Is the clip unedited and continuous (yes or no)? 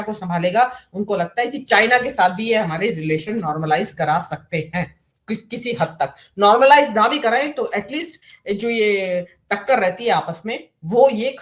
yes